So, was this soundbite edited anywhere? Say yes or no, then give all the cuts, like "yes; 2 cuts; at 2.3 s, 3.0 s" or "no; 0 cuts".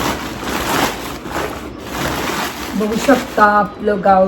no; 0 cuts